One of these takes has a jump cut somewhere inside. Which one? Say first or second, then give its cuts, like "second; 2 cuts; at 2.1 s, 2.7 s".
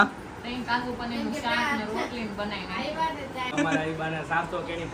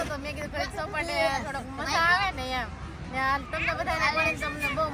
first; 1 cut; at 3.5 s